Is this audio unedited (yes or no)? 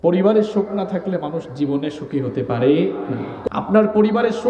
no